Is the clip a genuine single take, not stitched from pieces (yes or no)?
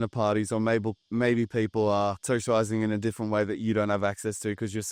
no